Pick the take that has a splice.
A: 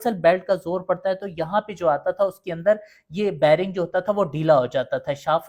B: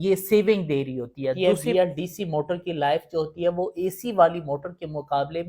B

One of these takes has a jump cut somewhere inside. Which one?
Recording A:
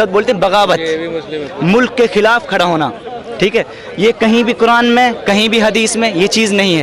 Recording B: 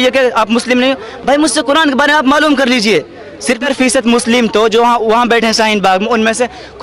B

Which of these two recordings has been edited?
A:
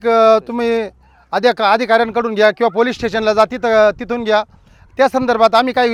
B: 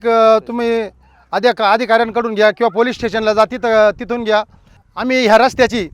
B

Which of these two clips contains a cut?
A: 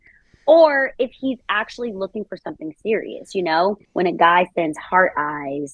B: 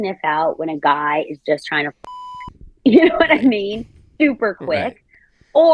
A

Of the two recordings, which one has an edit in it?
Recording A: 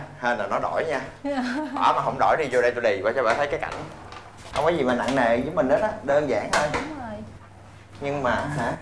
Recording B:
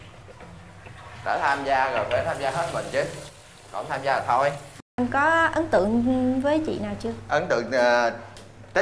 B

